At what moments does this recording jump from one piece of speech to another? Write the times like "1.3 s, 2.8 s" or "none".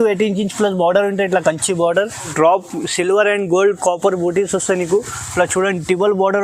2.3 s